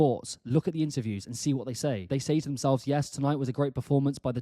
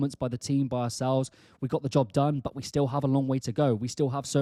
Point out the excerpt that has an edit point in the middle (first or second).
first